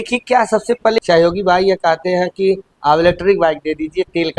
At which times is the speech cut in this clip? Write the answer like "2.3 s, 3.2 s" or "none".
1.0 s